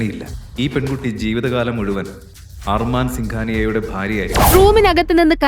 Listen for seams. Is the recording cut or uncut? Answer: cut